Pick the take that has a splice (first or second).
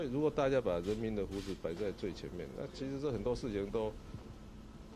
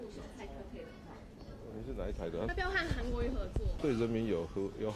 second